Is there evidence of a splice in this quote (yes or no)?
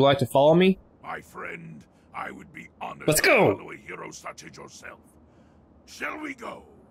no